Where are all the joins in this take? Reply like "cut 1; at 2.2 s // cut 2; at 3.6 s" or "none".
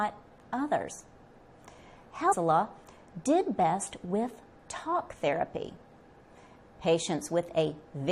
none